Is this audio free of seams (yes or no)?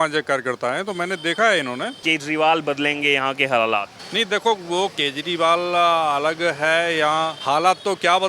no